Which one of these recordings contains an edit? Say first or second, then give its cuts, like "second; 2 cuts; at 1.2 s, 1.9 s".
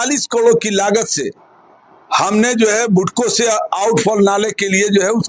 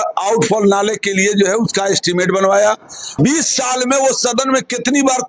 second; 1 cut; at 3.1 s